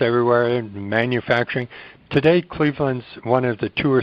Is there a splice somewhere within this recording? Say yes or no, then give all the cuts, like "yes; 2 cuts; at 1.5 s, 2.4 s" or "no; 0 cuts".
no; 0 cuts